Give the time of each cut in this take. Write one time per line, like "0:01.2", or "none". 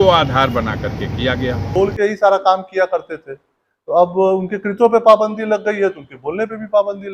0:01.8